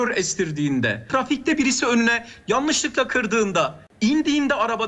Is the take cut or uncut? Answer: cut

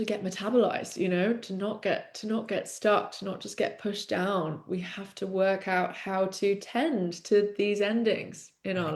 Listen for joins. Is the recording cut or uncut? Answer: uncut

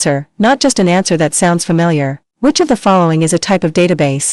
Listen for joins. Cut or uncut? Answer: uncut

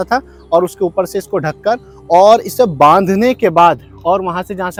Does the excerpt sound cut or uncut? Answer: uncut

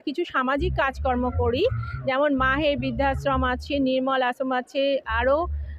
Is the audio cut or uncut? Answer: uncut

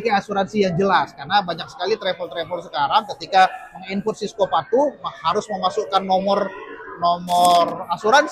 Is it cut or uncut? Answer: uncut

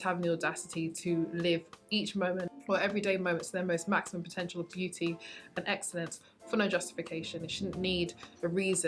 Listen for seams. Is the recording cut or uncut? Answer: uncut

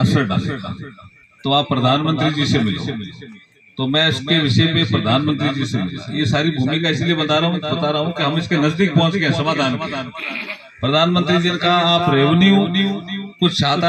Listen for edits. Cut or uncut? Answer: uncut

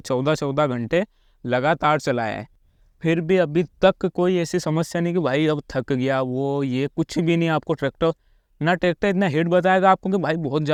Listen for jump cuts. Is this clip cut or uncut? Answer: uncut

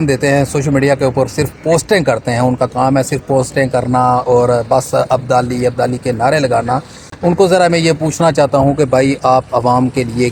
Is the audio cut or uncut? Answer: uncut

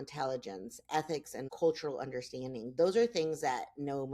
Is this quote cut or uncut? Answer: cut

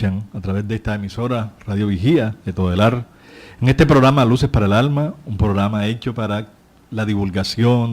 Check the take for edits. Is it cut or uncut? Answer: cut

